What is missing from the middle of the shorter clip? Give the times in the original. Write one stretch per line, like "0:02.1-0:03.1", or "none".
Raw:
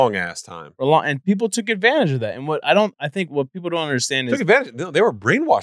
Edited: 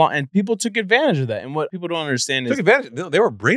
0:02.6-0:03.5